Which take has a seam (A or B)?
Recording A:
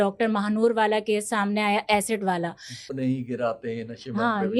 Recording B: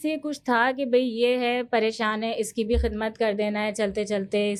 A